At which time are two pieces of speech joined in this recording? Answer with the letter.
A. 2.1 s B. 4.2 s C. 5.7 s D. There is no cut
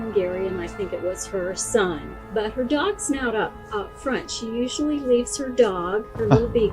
A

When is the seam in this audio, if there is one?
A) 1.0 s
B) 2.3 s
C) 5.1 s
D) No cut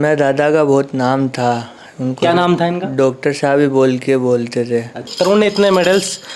C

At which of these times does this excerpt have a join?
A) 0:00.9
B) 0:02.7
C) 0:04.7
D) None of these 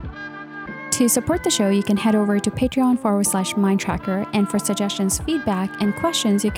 A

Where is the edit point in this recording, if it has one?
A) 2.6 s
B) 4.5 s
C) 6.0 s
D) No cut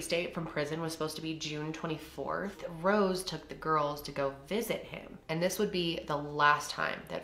A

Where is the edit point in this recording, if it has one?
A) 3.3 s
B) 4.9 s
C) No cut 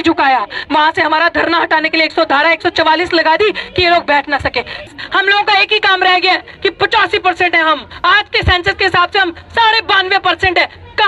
B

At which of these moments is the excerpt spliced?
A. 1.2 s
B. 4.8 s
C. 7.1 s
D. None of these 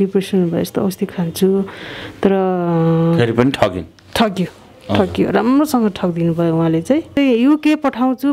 C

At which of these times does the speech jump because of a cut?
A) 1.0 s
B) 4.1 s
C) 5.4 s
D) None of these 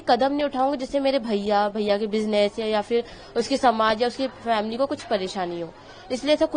D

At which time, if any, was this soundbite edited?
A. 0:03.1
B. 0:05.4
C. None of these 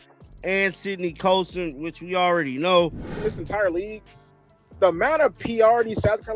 A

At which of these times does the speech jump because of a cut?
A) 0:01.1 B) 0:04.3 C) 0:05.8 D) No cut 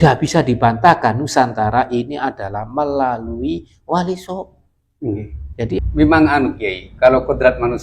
C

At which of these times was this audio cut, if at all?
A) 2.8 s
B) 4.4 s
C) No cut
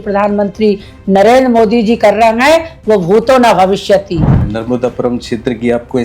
B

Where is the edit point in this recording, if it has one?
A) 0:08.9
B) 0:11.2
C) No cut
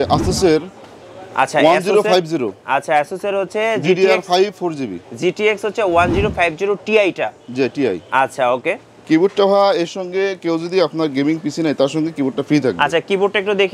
A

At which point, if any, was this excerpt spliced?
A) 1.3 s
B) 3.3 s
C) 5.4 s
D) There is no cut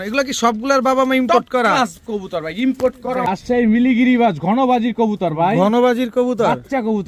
B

